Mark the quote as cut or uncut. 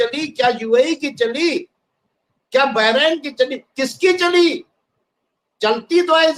uncut